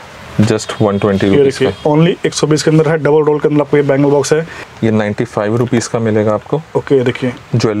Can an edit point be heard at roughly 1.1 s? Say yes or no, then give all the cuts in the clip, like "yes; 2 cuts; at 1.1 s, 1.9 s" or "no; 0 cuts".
no; 1 cut; at 4.6 s